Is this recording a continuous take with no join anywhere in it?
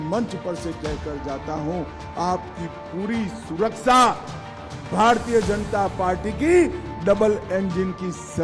yes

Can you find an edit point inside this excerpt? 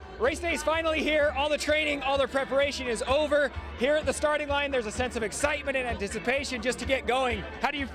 no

